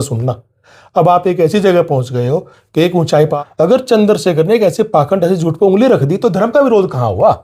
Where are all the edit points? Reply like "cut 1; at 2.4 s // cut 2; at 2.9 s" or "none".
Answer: cut 1; at 3.3 s

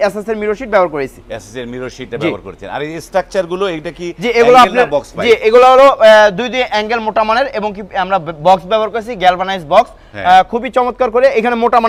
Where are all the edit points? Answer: none

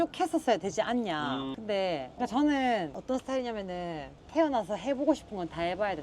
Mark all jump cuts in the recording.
cut 1; at 1.8 s

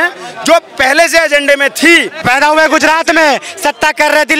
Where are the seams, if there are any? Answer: cut 1; at 2.2 s

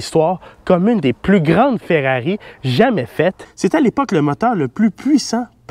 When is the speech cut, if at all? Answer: cut 1; at 3.5 s

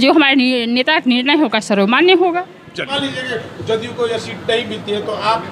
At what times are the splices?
cut 1; at 2.9 s

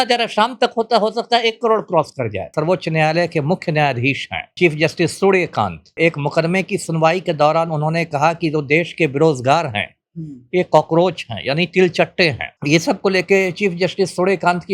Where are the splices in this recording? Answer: cut 1; at 2.5 s // cut 2; at 4.5 s // cut 3; at 5.9 s // cut 4; at 12.5 s

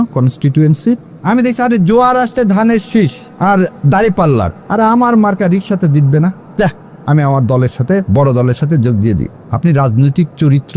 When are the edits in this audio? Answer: cut 1; at 1.1 s // cut 2; at 3.2 s // cut 3; at 4.6 s // cut 4; at 6.4 s // cut 5; at 9.4 s

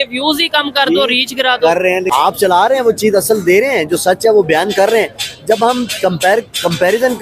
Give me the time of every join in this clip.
cut 1; at 2.1 s

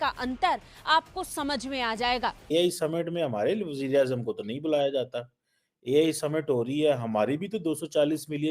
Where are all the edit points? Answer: cut 1; at 2.5 s

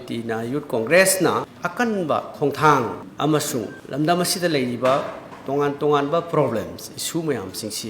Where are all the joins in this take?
cut 1; at 1.6 s // cut 2; at 3.0 s

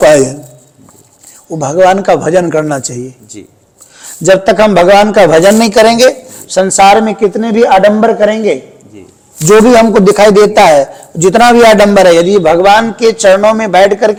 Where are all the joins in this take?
none

